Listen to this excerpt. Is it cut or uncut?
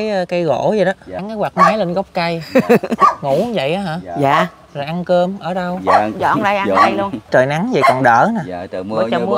cut